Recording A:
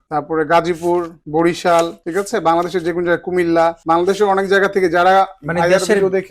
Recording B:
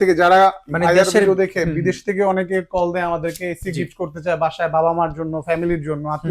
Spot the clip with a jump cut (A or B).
A